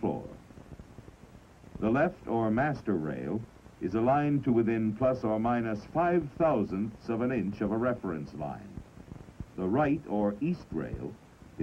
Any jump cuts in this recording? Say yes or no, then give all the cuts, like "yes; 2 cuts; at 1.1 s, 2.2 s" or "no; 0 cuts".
no; 0 cuts